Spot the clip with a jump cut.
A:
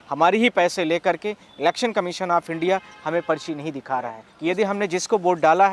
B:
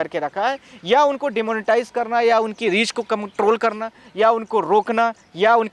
A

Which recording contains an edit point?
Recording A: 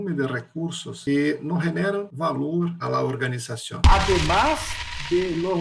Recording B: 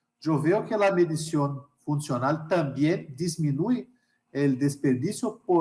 A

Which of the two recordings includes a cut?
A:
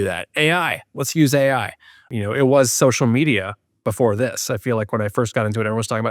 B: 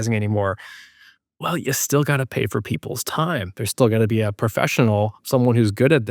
A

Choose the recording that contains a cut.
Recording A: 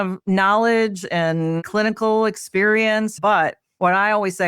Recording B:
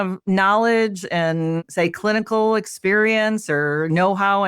A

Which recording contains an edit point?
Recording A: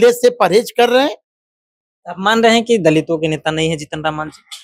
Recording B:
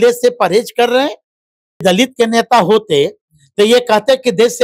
B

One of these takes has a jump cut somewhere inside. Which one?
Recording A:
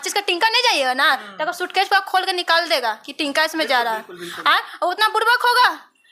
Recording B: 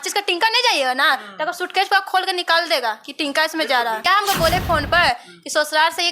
B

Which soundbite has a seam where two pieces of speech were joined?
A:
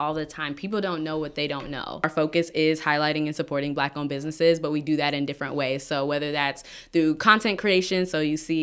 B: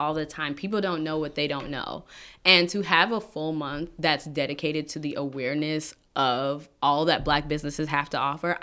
A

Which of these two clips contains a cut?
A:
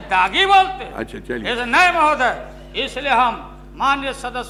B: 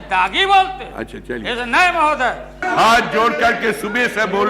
B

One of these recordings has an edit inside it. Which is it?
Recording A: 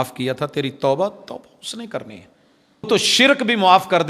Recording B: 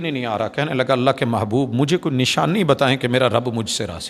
A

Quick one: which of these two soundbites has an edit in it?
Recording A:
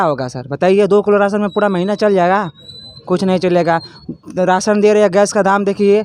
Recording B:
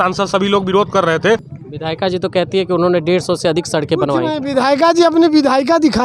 B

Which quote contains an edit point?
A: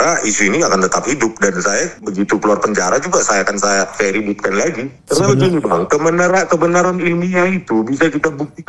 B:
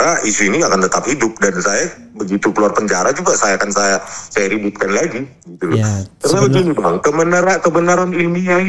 A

